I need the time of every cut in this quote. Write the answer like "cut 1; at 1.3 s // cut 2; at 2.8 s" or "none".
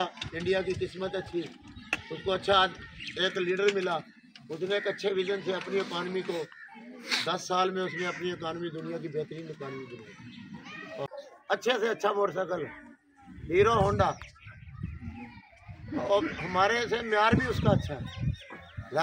cut 1; at 11.3 s